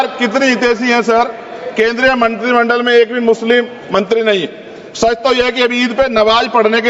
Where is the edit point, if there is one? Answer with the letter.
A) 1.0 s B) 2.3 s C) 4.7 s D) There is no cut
D